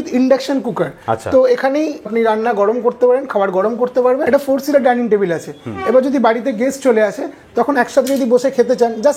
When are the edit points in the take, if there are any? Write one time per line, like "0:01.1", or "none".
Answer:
0:02.1
0:04.2